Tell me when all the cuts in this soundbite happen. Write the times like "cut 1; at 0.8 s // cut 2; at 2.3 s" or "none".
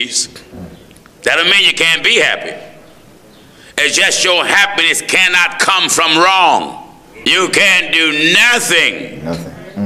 cut 1; at 7.3 s

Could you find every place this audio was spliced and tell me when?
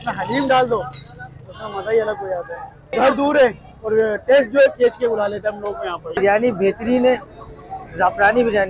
cut 1; at 2.9 s // cut 2; at 6.2 s

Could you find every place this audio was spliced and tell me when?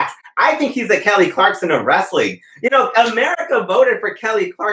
none

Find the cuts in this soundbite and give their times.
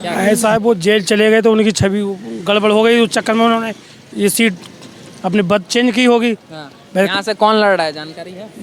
none

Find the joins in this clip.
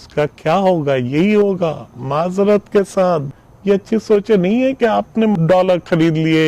cut 1; at 3.3 s // cut 2; at 5.3 s

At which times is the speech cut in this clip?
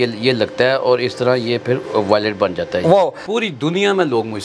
cut 1; at 3.2 s

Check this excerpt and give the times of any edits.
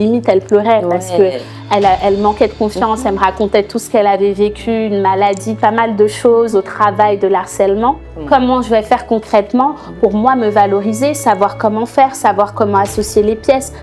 cut 1; at 8.1 s

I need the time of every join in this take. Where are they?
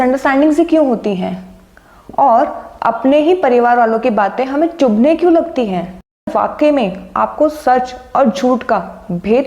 cut 1; at 6.3 s

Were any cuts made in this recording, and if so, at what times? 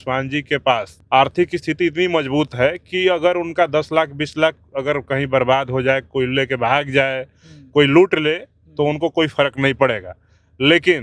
cut 1; at 0.9 s

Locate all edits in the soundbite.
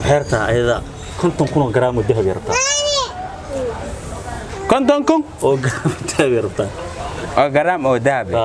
none

